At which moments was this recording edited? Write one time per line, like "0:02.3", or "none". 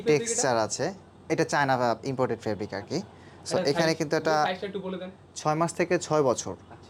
none